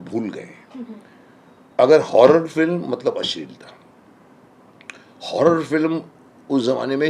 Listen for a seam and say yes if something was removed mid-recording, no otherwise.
no